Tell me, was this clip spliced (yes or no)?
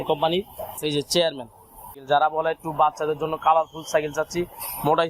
yes